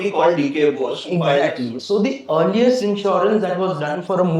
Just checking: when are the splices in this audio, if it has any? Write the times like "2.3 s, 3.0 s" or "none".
1.8 s